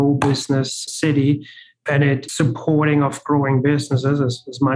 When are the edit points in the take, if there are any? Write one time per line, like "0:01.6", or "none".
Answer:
0:00.9
0:02.1

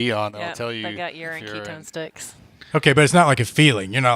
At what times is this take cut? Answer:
none

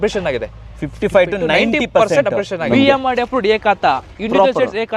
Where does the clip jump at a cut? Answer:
0:02.6

